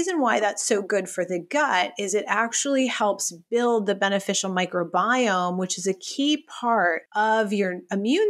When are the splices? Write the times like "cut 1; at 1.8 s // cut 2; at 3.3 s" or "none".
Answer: cut 1; at 7.0 s